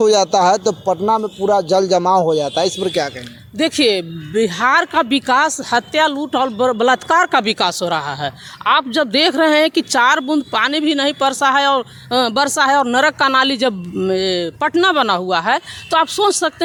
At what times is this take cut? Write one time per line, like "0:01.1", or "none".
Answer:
none